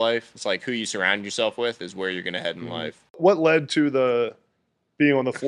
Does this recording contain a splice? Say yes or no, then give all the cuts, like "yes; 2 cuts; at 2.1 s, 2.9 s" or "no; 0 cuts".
yes; 1 cut; at 3.2 s